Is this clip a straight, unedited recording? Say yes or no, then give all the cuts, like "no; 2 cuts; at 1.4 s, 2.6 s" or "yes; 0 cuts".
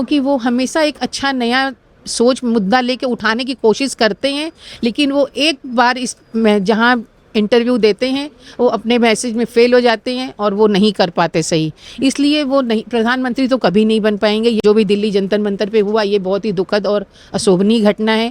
no; 1 cut; at 14.6 s